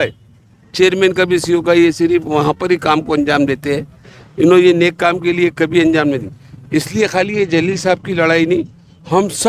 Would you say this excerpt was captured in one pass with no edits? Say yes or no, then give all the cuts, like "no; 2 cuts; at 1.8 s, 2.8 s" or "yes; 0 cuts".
yes; 0 cuts